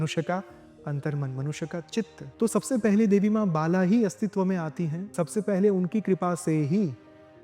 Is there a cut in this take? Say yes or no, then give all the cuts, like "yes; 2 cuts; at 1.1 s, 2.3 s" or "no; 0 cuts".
yes; 2 cuts; at 2.2 s, 5.0 s